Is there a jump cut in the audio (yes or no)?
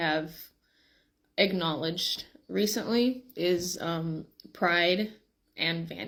no